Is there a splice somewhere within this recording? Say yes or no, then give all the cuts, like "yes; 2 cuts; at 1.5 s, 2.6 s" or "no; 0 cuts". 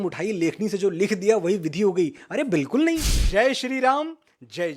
yes; 1 cut; at 3.2 s